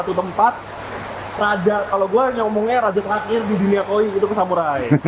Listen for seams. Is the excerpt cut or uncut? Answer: uncut